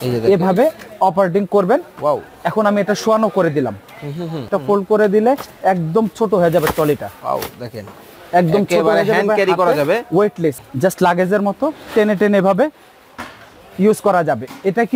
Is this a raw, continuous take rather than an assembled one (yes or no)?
no